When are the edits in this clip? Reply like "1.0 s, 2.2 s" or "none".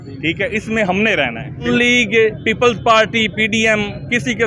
1.7 s